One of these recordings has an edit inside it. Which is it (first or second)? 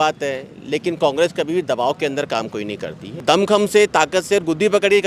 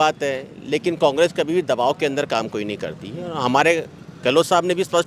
first